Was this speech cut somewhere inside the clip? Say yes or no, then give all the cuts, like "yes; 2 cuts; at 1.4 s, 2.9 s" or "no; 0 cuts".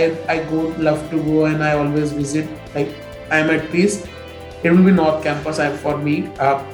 no; 0 cuts